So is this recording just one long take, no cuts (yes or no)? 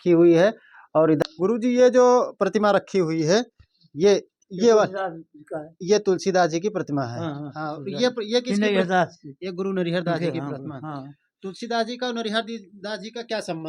no